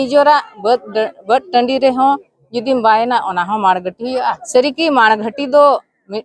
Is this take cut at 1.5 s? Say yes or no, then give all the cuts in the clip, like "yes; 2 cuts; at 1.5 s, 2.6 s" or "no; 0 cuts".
no; 1 cut; at 4.4 s